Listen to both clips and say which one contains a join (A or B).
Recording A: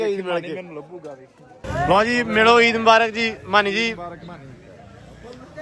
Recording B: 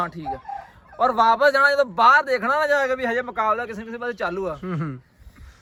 A